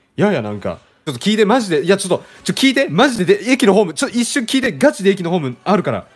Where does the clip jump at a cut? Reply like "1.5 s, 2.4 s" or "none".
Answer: 1.1 s